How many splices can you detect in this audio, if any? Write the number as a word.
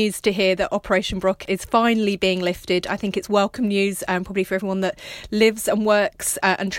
one